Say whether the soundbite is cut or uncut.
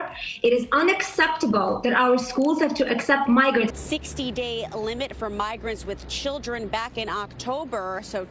cut